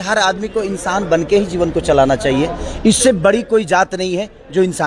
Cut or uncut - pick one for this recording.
uncut